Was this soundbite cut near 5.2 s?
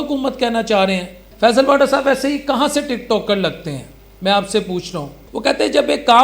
yes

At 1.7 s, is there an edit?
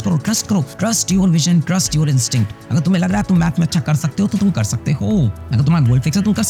no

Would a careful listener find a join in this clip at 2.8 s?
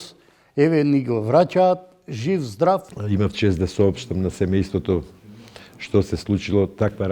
yes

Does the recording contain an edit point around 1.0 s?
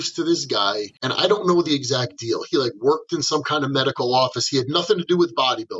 yes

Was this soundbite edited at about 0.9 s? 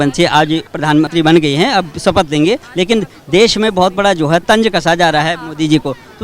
yes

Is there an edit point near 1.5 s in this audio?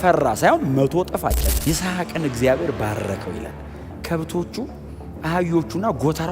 yes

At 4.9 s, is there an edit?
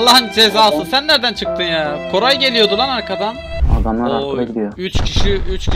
no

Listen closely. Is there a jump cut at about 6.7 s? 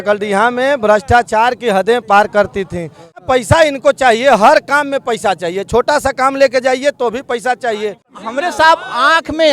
no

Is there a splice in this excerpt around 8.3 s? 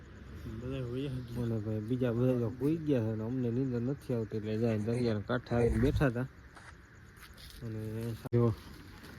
yes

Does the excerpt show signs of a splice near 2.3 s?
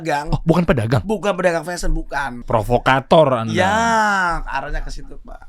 yes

